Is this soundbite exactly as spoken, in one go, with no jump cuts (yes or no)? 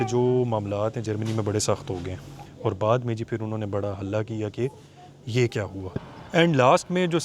no